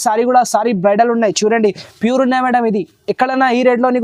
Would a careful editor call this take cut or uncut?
uncut